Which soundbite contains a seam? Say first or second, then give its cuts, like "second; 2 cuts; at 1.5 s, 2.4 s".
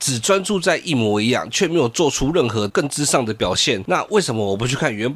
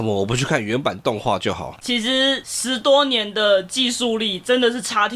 second; 1 cut; at 1.8 s